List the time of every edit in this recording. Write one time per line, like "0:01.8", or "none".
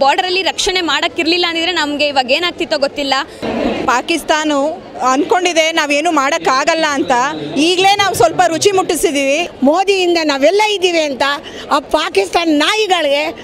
0:03.4
0:09.5